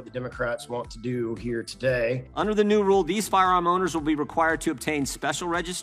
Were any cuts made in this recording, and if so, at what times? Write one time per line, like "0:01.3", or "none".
0:02.3